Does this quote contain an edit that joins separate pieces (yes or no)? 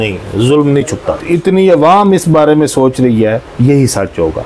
no